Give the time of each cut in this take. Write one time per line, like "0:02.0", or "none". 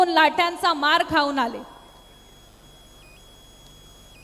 none